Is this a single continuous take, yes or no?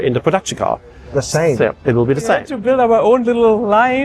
no